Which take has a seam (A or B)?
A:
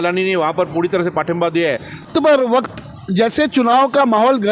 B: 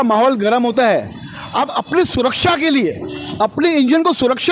A